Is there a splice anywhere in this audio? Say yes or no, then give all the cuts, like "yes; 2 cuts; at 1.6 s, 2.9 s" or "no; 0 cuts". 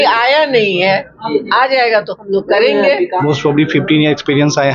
yes; 1 cut; at 3.1 s